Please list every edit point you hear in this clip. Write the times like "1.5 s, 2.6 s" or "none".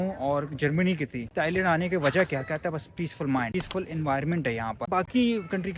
1.3 s, 4.9 s